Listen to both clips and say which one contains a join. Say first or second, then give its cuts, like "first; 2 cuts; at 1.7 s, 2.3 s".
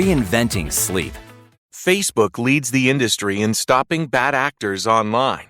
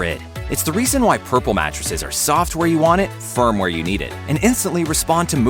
first; 1 cut; at 1.6 s